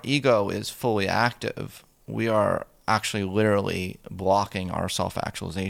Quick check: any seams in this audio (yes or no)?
no